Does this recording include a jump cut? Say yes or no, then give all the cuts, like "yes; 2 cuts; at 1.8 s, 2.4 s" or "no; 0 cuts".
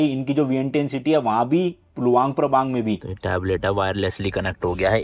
yes; 1 cut; at 3.1 s